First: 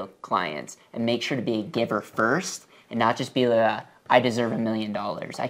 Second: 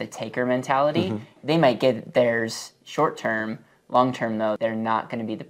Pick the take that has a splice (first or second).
second